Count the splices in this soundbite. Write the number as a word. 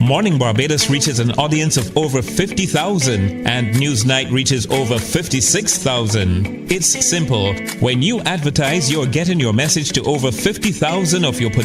one